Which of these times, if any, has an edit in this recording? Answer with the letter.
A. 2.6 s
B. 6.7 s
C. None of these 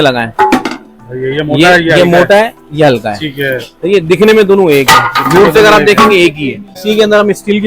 B